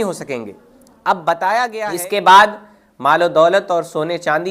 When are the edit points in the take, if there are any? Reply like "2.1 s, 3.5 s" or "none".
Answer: 1.8 s